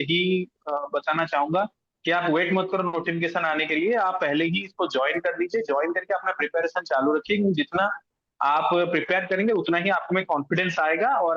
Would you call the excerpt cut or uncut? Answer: uncut